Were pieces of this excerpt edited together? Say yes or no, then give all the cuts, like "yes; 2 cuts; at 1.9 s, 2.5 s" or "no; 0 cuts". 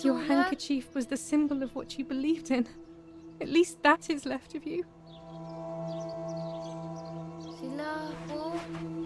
no; 0 cuts